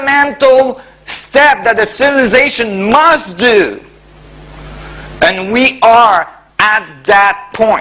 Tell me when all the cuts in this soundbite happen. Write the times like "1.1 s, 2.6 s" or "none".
6.2 s